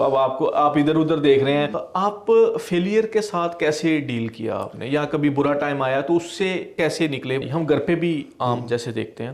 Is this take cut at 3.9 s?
no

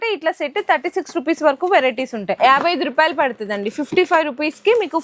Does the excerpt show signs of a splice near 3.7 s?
no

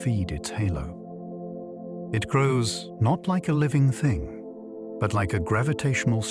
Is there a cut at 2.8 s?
yes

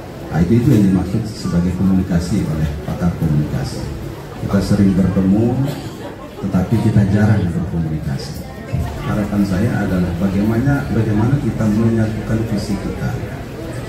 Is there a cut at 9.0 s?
yes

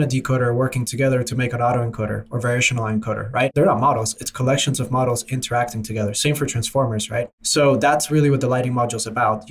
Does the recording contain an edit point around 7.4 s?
yes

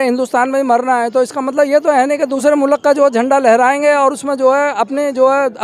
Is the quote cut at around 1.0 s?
no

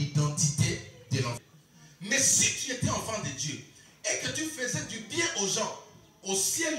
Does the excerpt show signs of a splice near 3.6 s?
no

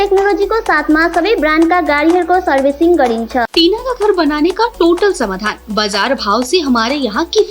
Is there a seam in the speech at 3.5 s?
yes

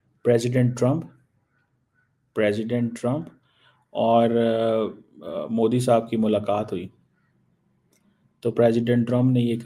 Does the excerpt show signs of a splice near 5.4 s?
no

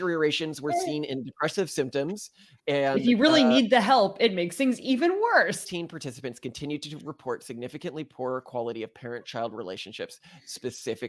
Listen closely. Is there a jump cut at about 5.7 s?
yes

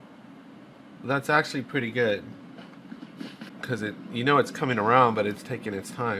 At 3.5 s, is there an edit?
yes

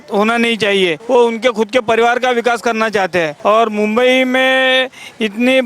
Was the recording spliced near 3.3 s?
yes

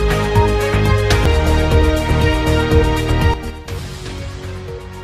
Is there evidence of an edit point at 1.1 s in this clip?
yes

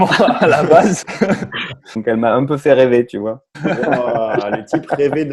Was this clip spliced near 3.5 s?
yes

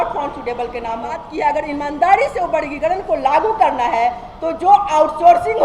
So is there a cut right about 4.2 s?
no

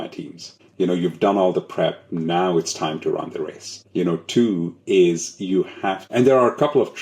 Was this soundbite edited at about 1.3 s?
no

